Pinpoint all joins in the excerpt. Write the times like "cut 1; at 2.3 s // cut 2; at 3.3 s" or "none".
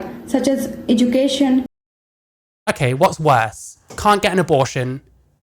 none